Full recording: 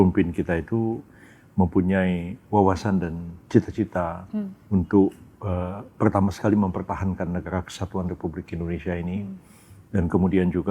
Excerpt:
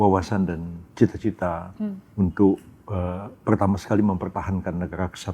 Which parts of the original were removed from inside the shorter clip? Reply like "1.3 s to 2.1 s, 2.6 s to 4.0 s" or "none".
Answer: none